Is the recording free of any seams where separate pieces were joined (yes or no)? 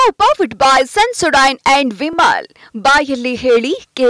yes